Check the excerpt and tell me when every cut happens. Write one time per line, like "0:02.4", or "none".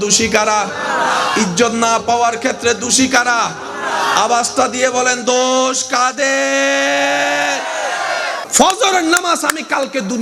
0:08.4